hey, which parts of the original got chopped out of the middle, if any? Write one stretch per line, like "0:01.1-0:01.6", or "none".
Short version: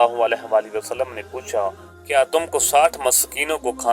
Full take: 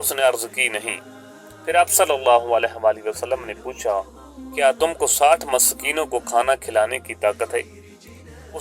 0:04.2-0:04.4